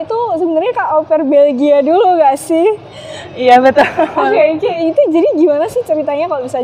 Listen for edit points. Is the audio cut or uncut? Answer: uncut